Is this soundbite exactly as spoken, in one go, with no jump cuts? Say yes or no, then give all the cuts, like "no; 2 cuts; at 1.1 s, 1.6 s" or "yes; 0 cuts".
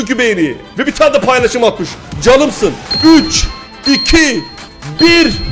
yes; 0 cuts